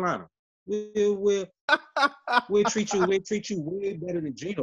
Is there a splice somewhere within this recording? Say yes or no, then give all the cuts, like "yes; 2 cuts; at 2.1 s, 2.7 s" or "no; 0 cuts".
no; 0 cuts